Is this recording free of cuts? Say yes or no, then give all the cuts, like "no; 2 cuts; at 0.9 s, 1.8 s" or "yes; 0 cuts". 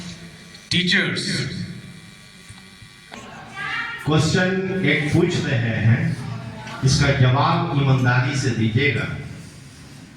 no; 1 cut; at 3.1 s